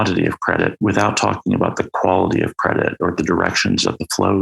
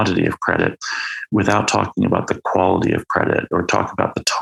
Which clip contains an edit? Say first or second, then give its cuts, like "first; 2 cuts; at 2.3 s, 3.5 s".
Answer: first; 2 cuts; at 0.7 s, 3.1 s